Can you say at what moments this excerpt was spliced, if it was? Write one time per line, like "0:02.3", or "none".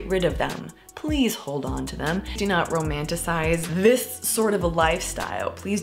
0:02.4
0:03.7